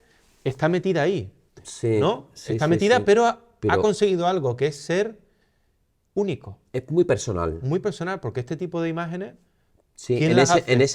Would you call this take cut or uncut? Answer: uncut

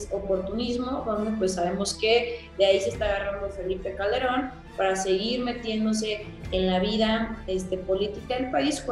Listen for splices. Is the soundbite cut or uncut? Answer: uncut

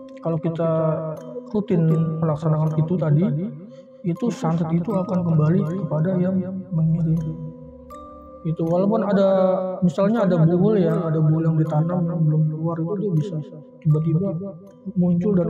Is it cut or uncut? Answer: uncut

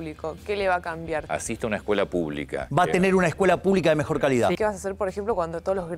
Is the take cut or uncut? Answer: cut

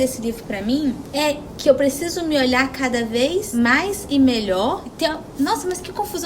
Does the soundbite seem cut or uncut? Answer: cut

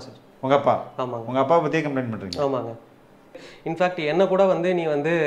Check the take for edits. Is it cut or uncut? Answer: cut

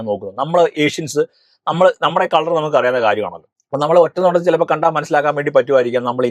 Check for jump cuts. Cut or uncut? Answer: uncut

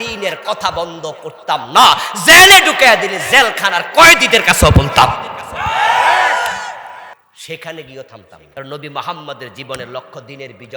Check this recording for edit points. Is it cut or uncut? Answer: cut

